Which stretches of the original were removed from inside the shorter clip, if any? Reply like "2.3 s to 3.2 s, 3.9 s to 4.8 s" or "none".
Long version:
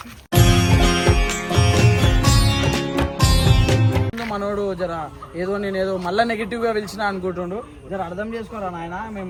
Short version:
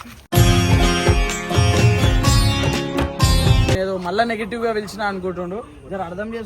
3.8 s to 5.8 s